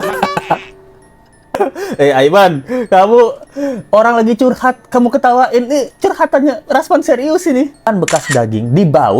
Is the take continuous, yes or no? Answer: no